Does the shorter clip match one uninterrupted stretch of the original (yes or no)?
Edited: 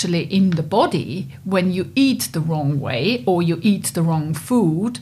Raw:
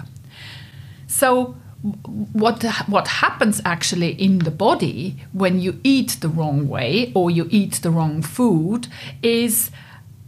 yes